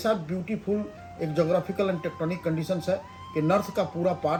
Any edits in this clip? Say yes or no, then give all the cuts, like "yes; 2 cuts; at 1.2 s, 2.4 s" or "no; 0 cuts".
no; 0 cuts